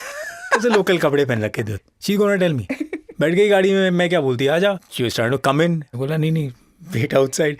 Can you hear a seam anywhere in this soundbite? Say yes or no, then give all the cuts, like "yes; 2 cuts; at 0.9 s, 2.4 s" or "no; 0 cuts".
yes; 2 cuts; at 1.7 s, 4.9 s